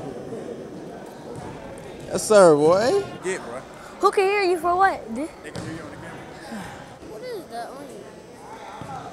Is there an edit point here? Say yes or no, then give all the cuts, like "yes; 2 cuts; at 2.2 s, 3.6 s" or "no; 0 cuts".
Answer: yes; 2 cuts; at 3.2 s, 7.0 s